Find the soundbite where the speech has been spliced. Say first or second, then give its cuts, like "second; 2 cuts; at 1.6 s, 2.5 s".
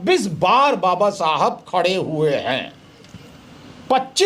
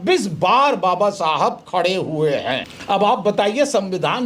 second; 1 cut; at 2.7 s